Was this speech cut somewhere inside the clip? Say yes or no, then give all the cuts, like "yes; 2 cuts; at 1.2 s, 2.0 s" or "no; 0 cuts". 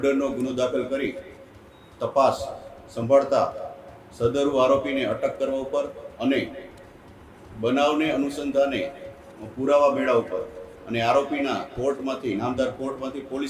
no; 0 cuts